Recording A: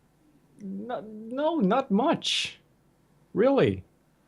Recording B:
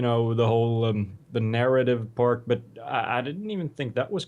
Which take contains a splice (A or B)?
B